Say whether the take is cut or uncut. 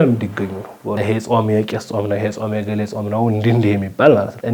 cut